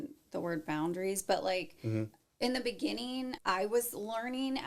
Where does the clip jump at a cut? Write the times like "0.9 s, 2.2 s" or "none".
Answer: 3.4 s